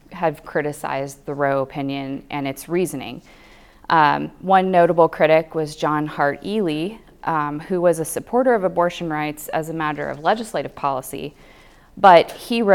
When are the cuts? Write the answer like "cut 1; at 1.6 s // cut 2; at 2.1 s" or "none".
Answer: none